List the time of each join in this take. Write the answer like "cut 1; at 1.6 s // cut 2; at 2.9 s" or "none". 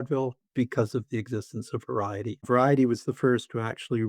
cut 1; at 2.4 s